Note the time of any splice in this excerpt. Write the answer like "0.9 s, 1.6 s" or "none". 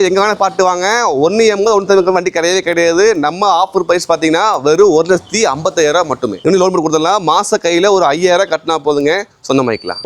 6.4 s